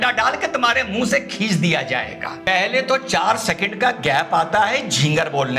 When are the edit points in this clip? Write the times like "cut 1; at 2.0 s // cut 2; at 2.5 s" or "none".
cut 1; at 2.4 s